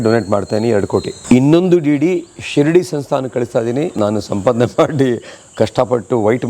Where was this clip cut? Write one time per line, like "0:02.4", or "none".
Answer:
0:01.1
0:03.9